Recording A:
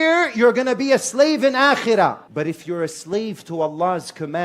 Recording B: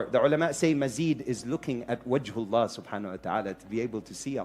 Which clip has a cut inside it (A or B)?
A